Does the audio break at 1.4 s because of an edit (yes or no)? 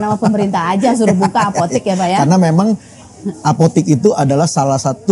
no